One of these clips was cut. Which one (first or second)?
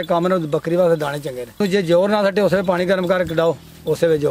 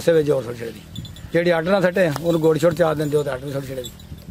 first